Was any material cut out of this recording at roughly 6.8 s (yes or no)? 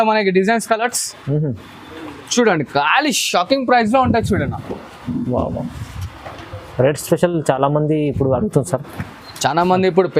no